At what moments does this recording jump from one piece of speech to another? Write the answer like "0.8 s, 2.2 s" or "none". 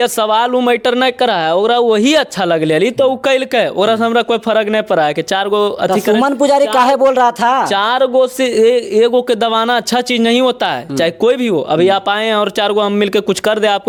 none